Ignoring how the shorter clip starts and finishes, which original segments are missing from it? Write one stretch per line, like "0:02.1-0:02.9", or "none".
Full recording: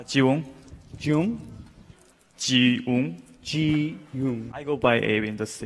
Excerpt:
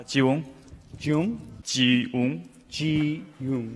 0:01.6-0:02.3